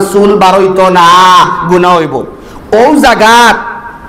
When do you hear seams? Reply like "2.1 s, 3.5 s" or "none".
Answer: none